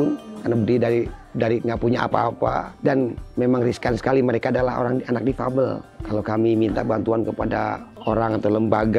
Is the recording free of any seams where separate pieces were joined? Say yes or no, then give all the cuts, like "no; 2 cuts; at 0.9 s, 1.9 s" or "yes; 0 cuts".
no; 3 cuts; at 2.7 s, 5.9 s, 7.9 s